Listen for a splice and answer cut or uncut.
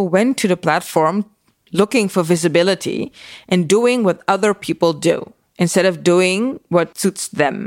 uncut